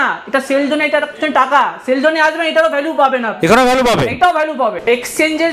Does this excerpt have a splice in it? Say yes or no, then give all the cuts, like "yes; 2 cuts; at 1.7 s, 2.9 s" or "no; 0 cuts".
no; 0 cuts